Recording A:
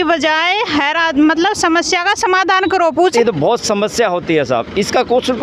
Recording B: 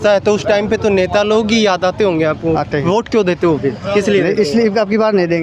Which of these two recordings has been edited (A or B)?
A